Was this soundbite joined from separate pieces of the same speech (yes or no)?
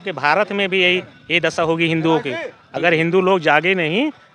no